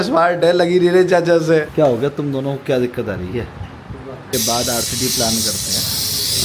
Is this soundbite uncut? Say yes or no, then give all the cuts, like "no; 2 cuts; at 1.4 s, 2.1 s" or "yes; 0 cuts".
no; 2 cuts; at 1.7 s, 4.3 s